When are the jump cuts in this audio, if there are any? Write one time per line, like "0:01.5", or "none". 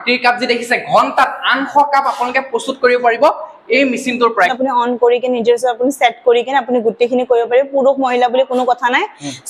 0:04.5